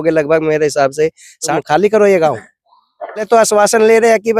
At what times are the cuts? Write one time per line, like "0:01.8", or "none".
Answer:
0:01.5
0:03.2